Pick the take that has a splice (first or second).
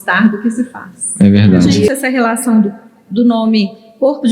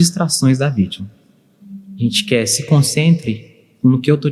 first